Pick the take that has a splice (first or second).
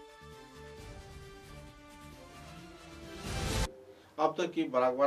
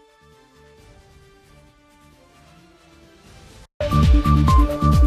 second